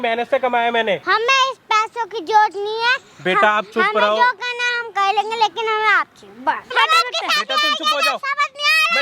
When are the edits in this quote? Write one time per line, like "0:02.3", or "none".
0:01.0
0:06.7